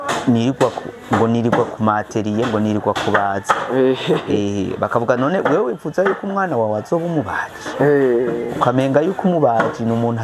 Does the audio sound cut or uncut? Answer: uncut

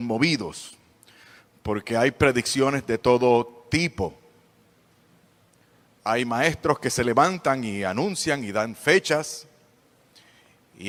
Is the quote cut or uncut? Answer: uncut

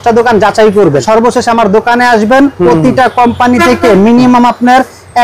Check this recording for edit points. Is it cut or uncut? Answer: cut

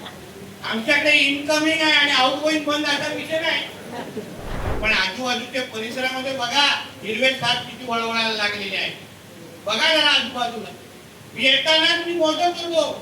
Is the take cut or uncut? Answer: cut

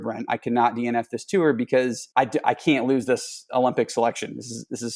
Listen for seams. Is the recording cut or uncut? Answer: cut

